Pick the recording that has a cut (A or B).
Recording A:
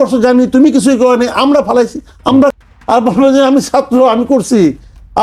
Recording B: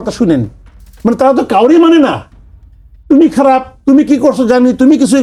A